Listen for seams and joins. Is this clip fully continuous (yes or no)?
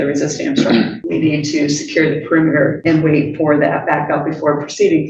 no